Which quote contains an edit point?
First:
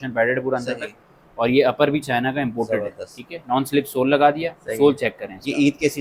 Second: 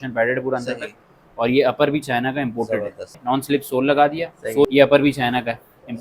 second; 2 cuts; at 3.1 s, 4.7 s

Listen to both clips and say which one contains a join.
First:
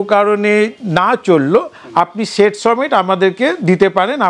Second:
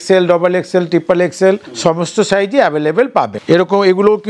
second; 2 cuts; at 1.7 s, 3.4 s

